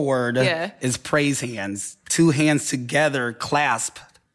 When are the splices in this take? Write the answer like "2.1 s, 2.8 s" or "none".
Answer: none